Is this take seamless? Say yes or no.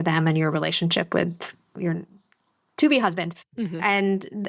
no